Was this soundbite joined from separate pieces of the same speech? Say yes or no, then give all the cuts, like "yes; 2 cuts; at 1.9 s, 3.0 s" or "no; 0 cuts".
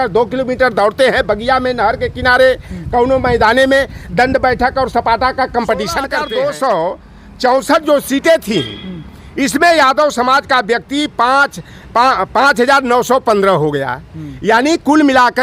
yes; 1 cut; at 6.1 s